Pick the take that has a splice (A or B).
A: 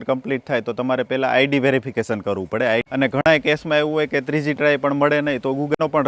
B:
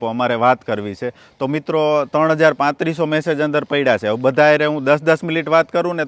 A